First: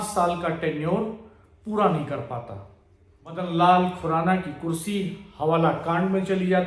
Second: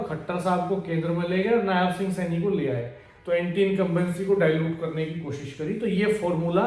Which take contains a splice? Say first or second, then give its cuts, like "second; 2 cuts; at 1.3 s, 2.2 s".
first; 1 cut; at 3.4 s